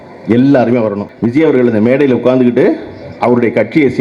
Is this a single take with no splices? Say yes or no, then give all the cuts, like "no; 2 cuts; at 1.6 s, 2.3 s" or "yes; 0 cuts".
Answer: no; 1 cut; at 1.0 s